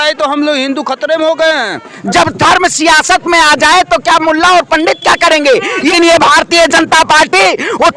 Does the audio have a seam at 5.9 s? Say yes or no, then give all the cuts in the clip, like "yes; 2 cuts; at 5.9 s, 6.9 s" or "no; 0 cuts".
yes; 2 cuts; at 1.9 s, 5.9 s